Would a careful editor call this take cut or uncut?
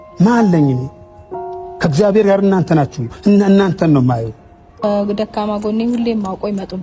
cut